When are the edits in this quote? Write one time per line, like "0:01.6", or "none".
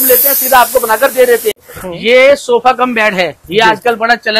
0:01.8